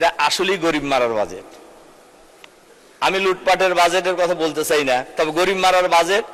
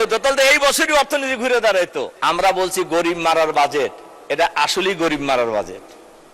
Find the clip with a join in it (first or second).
second